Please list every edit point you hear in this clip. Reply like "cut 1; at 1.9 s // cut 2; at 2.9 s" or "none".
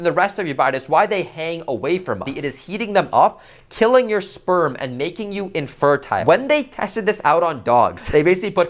cut 1; at 2.3 s // cut 2; at 6.2 s